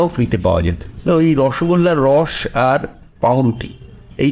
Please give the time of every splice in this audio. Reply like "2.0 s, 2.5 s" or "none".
1.1 s